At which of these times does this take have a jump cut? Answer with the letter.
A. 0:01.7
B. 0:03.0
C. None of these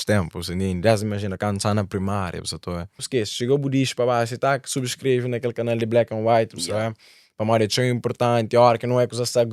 B